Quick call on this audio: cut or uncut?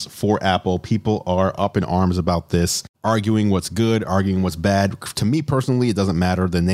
uncut